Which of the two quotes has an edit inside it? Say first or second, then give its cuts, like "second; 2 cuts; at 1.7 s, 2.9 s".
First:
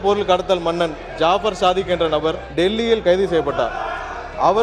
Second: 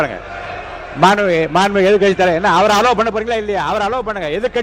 first; 1 cut; at 2.4 s